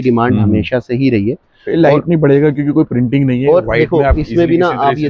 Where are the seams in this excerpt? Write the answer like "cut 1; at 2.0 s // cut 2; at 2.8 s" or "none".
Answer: none